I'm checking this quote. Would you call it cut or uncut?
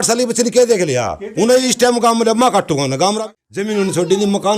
cut